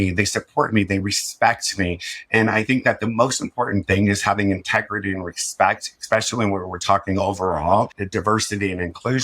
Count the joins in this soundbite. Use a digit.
1